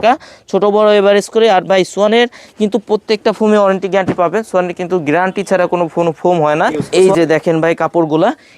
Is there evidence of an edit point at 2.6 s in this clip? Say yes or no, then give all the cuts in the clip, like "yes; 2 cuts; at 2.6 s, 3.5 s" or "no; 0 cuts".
no; 1 cut; at 6.8 s